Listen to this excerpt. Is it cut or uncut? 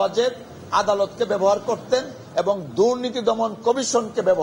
uncut